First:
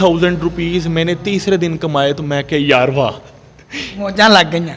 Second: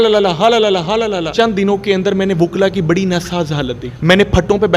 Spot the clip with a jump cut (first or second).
second